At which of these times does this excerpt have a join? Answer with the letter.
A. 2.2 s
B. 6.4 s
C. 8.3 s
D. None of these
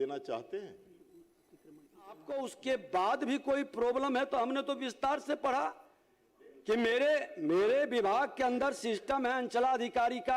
A